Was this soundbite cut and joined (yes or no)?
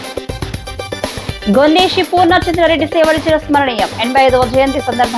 yes